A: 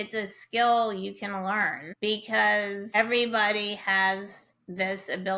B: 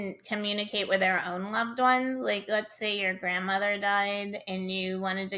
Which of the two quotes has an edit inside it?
A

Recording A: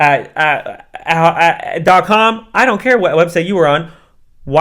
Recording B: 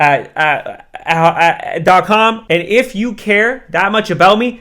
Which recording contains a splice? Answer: B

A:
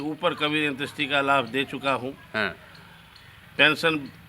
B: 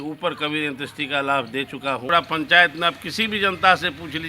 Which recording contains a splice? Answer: B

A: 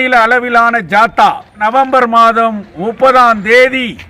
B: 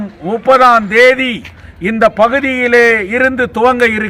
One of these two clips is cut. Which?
A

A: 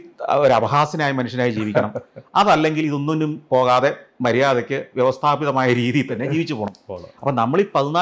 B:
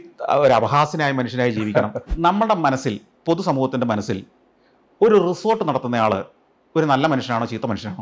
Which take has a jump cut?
B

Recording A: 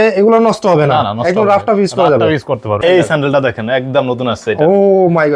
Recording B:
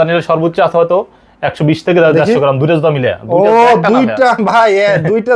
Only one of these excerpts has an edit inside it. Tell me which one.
A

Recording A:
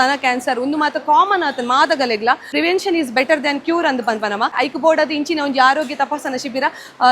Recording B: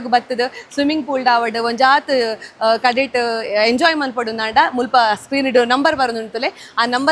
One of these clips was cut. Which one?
A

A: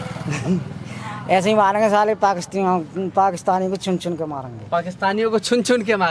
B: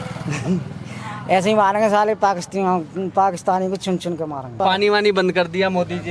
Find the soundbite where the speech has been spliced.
B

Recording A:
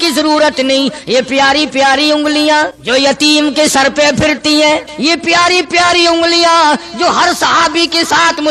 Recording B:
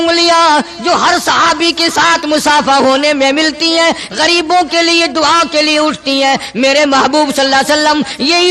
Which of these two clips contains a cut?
A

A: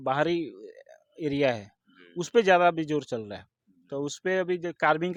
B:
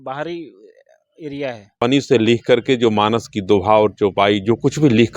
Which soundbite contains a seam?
B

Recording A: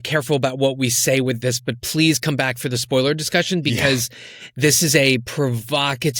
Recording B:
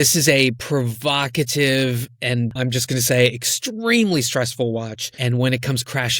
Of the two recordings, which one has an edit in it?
B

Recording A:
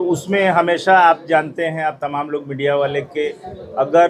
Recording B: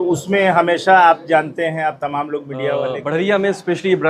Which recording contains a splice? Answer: B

